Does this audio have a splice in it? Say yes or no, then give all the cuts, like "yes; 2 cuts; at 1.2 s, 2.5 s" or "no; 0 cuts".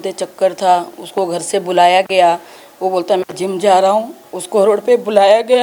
no; 0 cuts